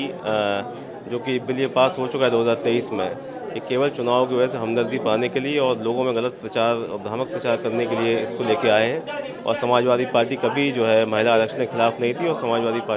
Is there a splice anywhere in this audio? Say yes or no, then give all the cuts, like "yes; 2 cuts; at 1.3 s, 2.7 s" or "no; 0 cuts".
no; 0 cuts